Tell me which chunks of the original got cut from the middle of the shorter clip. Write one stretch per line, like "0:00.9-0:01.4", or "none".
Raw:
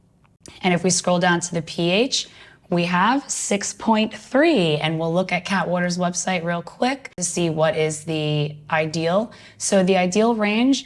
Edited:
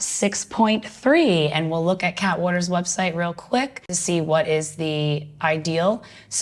none